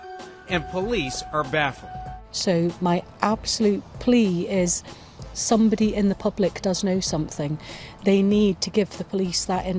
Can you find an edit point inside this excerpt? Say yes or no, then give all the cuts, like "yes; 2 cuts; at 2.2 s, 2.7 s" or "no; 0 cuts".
yes; 1 cut; at 1.9 s